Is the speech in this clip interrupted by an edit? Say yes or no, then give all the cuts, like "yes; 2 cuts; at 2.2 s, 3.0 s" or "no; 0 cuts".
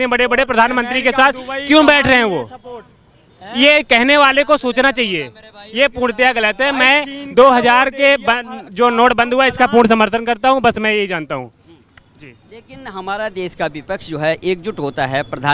no; 0 cuts